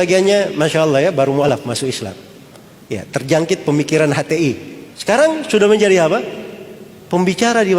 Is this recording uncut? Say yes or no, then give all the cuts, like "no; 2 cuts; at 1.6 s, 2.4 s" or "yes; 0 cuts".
no; 1 cut; at 1.5 s